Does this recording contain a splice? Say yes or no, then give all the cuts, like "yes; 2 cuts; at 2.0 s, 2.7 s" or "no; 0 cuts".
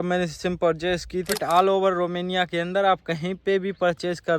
yes; 1 cut; at 1.3 s